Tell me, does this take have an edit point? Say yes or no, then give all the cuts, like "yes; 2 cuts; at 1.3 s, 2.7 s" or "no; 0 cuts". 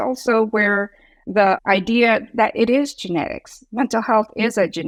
no; 0 cuts